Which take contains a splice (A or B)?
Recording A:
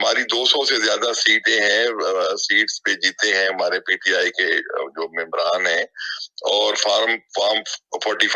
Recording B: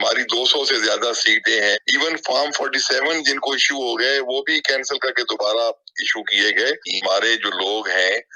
B